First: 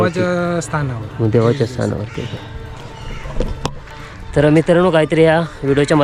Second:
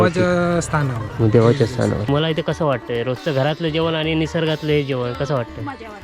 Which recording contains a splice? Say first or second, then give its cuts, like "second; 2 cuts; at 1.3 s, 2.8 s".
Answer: second; 1 cut; at 2.1 s